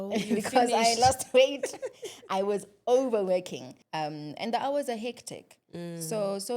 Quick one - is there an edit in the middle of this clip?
yes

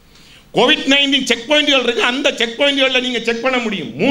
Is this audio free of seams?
yes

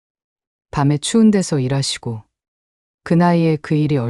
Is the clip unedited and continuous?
yes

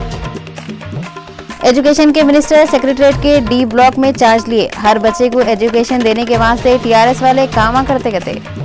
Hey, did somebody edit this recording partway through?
no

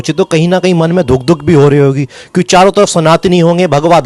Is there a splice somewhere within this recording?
no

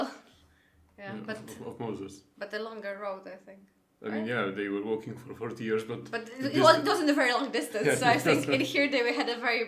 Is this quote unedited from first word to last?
yes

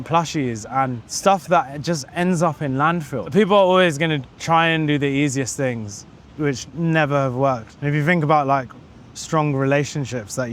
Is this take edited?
yes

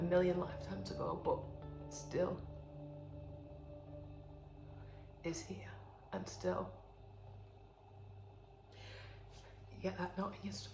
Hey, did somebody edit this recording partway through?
no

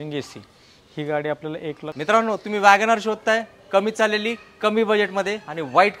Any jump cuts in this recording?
yes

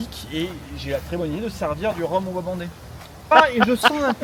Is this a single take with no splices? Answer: no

